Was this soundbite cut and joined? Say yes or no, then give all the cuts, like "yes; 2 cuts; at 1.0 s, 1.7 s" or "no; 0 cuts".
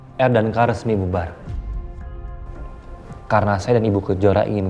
yes; 1 cut; at 3.1 s